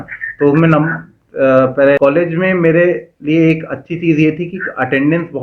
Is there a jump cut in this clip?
yes; 1 cut; at 2.0 s

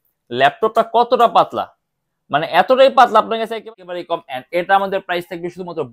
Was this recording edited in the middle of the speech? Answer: yes; 1 cut; at 3.6 s

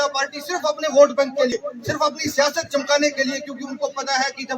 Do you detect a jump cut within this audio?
yes; 1 cut; at 1.5 s

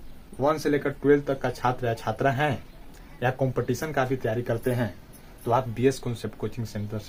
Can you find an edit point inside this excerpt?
no; 0 cuts

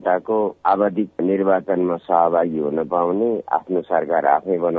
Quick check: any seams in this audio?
yes; 1 cut; at 1.1 s

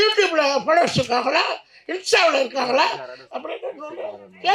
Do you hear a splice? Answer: no; 0 cuts

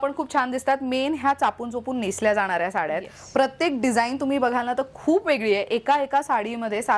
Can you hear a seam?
no; 0 cuts

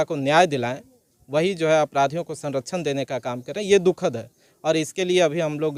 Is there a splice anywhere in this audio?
no; 0 cuts

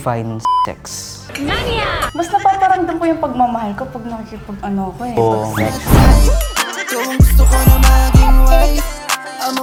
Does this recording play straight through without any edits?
yes; 0 cuts

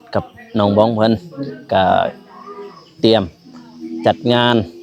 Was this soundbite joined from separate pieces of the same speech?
no; 0 cuts

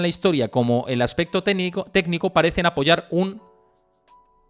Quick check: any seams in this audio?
no; 0 cuts

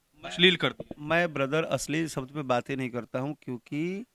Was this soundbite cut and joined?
no; 0 cuts

